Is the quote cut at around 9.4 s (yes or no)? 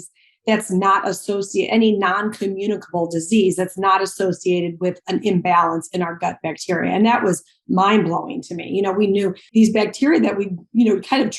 yes